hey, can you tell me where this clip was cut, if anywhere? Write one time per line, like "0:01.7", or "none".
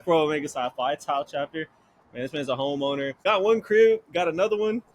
0:03.2